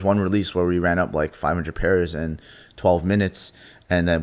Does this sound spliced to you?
no; 0 cuts

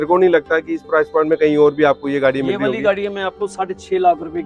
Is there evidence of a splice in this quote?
no; 0 cuts

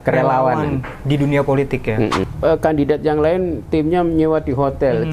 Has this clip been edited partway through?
yes; 1 cut; at 2.2 s

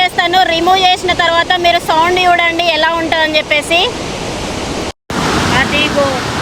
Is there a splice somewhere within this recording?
no; 0 cuts

